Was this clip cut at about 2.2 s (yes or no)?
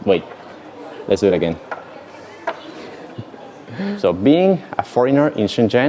no